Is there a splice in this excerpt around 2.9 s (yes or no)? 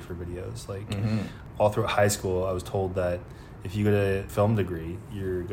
no